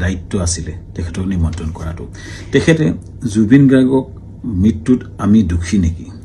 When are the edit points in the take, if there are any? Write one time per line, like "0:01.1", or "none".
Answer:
0:02.8